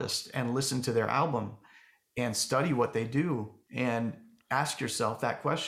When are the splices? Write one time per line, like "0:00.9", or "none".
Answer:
0:03.6

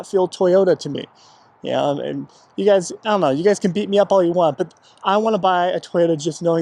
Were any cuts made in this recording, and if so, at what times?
none

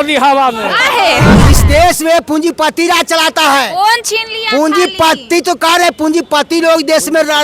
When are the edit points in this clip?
0:01.3

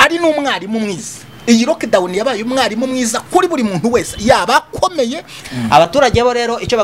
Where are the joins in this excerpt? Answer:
0:05.4

